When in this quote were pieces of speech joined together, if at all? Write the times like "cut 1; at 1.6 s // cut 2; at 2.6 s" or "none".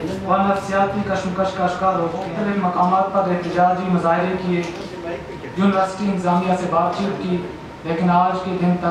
cut 1; at 2.3 s